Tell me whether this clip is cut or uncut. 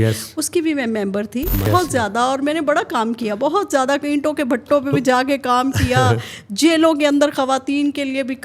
cut